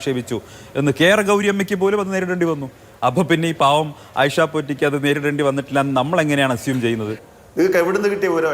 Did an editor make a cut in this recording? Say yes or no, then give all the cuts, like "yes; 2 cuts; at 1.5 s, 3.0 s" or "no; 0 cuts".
yes; 1 cut; at 7.3 s